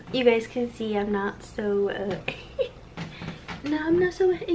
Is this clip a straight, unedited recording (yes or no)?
yes